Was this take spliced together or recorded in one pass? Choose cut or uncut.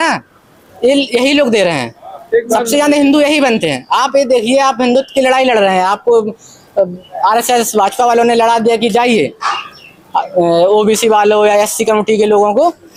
uncut